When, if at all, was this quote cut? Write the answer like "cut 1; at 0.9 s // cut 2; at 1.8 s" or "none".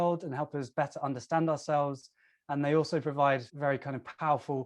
cut 1; at 3.5 s